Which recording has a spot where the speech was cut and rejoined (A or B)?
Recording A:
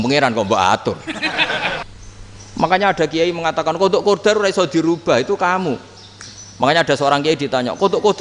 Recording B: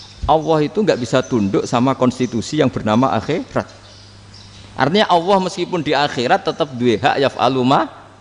A